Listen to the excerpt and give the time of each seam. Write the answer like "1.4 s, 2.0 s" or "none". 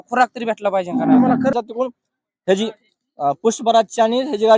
1.5 s

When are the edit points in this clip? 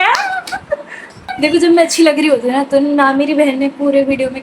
1.2 s

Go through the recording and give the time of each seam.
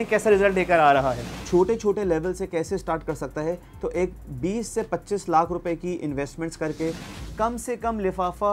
1.3 s, 7.1 s

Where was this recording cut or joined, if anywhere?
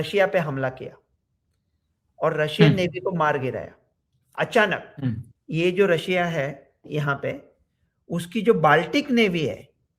5.3 s

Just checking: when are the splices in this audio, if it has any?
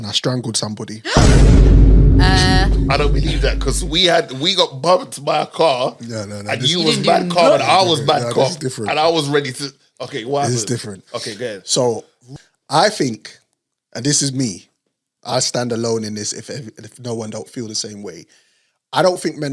12.2 s

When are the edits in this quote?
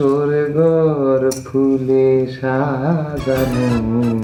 none

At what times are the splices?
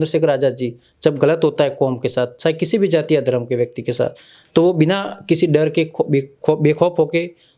none

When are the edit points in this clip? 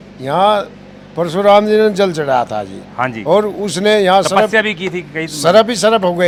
none

